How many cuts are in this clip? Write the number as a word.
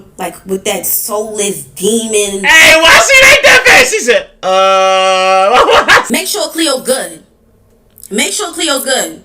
one